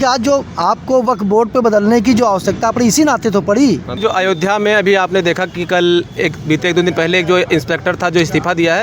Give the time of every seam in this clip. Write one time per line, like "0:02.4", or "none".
0:04.0